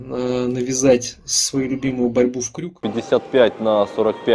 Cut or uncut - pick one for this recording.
cut